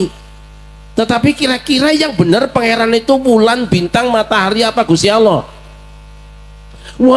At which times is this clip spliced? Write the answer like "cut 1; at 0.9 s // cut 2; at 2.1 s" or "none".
none